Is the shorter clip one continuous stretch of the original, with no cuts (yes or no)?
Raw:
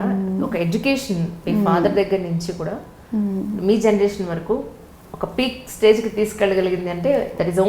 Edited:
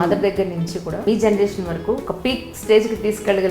no